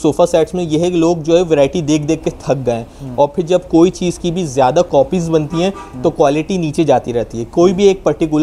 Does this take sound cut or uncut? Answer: uncut